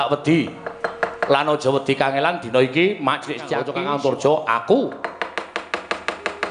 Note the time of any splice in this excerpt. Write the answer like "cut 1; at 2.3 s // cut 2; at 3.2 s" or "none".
cut 1; at 3.6 s